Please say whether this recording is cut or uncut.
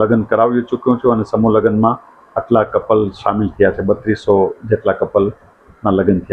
uncut